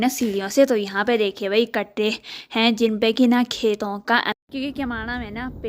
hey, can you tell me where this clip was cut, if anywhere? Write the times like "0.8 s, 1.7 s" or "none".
4.3 s